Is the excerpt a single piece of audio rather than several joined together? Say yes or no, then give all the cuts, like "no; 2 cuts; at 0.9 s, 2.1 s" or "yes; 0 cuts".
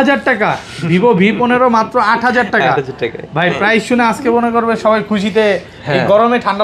yes; 0 cuts